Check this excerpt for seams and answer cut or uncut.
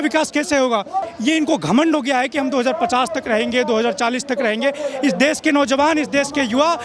cut